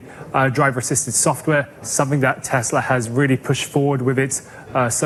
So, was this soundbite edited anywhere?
no; 0 cuts

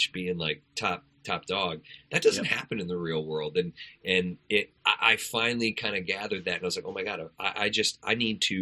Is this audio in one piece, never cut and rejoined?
yes; 0 cuts

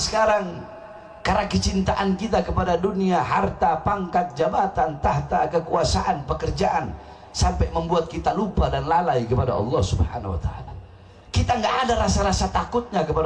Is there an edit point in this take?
no; 0 cuts

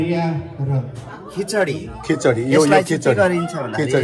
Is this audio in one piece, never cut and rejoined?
no; 1 cut; at 1.0 s

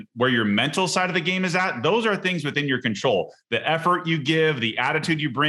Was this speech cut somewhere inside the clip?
no; 0 cuts

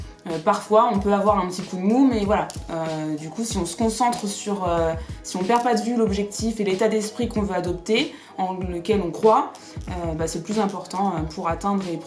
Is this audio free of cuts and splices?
yes; 0 cuts

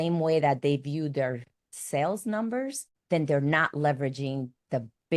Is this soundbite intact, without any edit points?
no; 1 cut; at 2.9 s

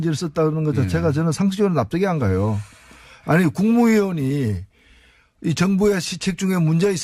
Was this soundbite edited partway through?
yes; 1 cut; at 1.3 s

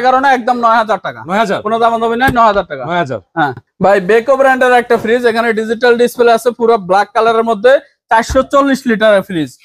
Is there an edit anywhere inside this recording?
no; 0 cuts

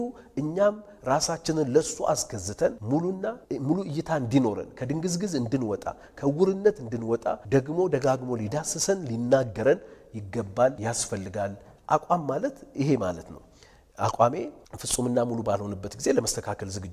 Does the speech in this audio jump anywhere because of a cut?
yes; 1 cut; at 11.7 s

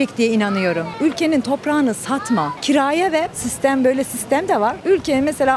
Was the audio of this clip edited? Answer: no; 0 cuts

